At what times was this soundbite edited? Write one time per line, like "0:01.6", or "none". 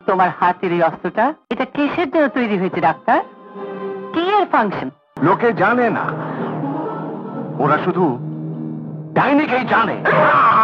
0:01.4
0:05.1